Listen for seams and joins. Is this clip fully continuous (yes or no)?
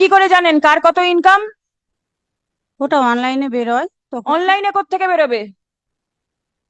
yes